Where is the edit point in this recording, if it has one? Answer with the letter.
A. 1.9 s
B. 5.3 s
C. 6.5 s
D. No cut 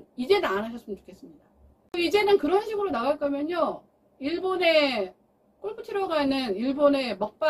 A